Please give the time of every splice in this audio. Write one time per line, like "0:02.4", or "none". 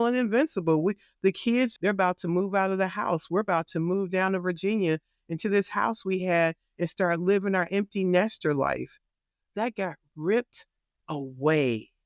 0:01.7